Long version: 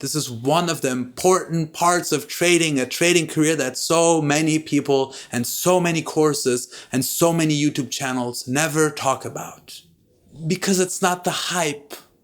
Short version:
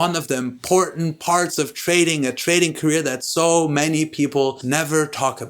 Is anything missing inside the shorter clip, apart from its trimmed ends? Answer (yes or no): yes